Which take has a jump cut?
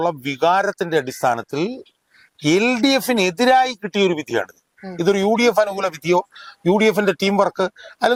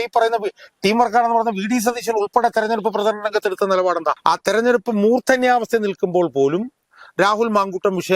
second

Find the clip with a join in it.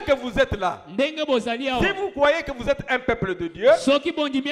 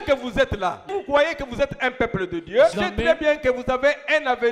second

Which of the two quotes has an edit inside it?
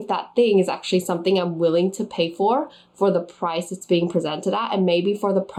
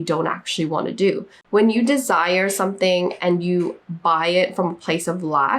second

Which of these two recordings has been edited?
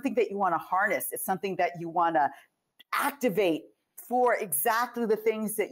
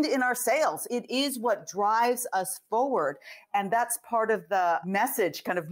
second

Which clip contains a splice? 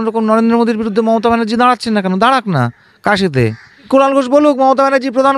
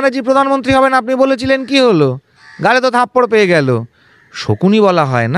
first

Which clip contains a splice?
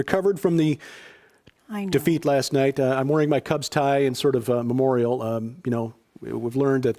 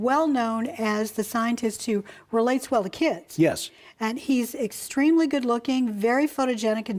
first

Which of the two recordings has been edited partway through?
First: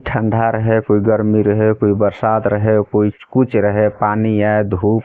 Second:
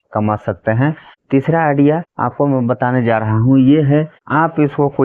second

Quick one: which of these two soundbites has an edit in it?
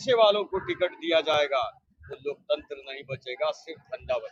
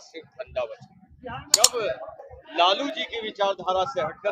second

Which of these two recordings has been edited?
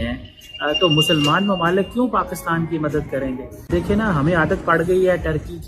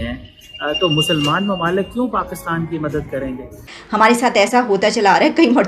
second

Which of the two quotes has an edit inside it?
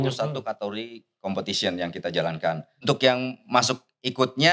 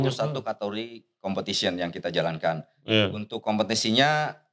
first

